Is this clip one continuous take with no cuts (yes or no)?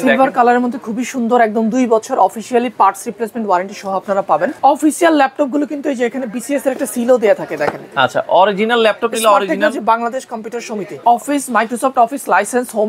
no